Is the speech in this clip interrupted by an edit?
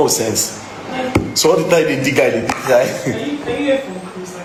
no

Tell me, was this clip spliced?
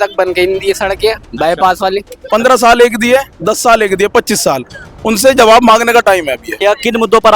yes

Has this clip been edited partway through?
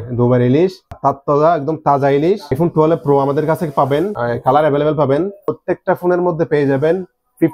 yes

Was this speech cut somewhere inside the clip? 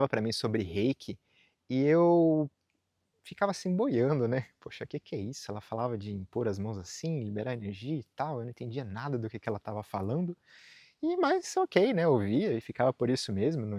no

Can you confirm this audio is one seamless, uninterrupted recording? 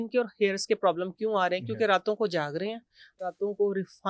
yes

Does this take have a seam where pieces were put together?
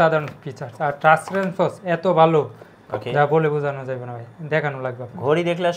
no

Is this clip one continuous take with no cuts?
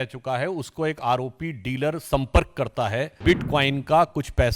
no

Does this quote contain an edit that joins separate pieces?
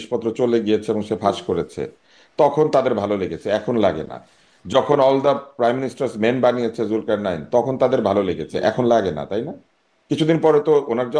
no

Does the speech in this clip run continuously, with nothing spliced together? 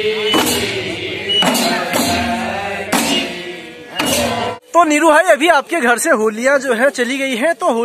no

